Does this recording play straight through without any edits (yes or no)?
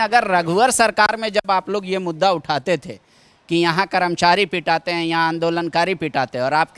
yes